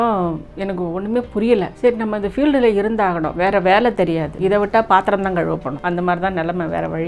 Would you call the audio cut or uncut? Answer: cut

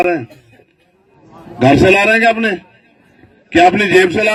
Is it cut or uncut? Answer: uncut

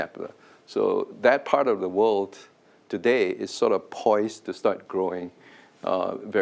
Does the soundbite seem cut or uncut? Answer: cut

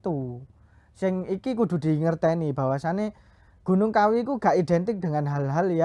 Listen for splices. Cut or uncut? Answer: uncut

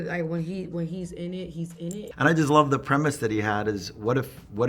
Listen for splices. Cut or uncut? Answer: cut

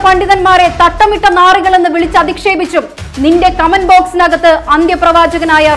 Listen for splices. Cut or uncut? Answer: uncut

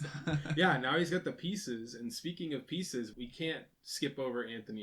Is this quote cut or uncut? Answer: cut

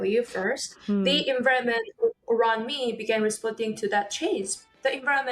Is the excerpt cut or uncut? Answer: uncut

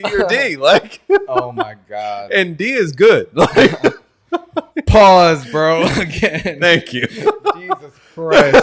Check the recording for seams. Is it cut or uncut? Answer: uncut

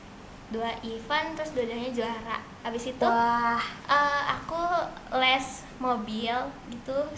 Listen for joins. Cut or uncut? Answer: uncut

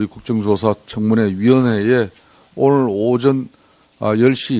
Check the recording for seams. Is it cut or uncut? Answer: cut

